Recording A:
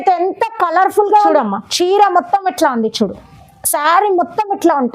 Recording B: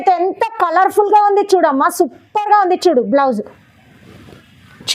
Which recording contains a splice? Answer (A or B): A